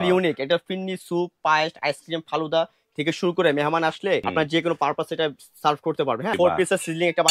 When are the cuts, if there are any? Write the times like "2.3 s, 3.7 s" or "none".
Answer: 4.3 s, 6.3 s